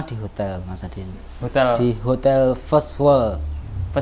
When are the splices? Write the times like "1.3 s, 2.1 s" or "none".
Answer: none

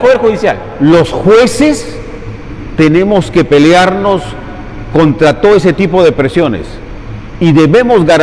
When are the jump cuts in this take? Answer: none

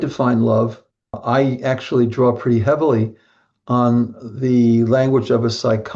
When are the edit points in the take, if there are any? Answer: 1.2 s

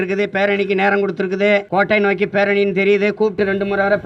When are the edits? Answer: 1.7 s

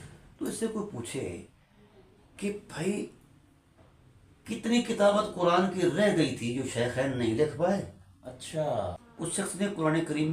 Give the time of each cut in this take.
9.0 s

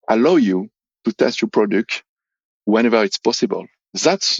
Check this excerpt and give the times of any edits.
2.7 s

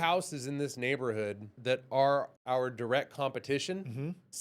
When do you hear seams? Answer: 1.6 s, 2.3 s

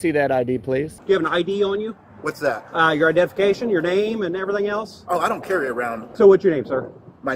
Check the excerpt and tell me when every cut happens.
1.0 s, 6.1 s

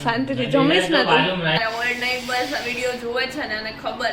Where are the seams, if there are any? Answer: 1.6 s

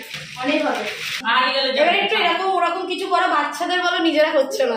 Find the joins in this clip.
1.1 s

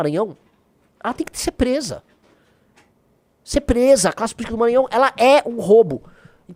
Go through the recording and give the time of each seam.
none

